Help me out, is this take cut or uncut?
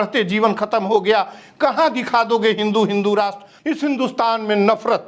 cut